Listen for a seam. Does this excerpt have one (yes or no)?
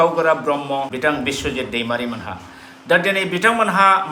yes